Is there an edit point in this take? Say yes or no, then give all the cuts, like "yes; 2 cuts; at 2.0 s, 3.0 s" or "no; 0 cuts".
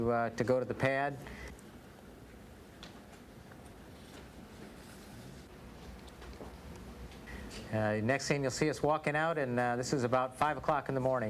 yes; 1 cut; at 4.1 s